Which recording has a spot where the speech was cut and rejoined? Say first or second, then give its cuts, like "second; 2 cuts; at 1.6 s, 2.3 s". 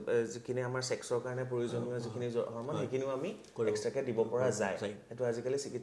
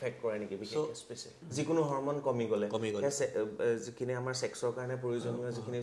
second; 1 cut; at 1.4 s